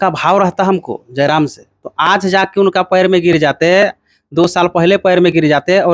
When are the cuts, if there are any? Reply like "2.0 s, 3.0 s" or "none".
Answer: none